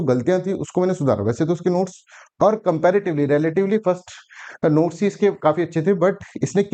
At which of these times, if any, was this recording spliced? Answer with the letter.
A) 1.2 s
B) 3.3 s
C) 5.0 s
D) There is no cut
D